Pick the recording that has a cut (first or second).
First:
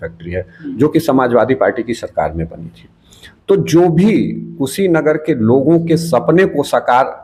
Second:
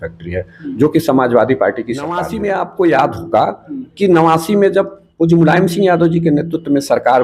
second